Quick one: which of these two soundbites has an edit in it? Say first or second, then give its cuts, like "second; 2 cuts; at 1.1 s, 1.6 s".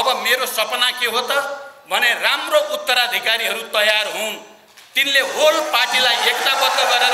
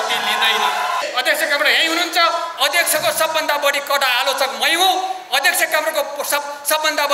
second; 1 cut; at 1.0 s